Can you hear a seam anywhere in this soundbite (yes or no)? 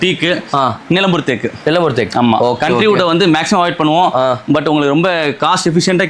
no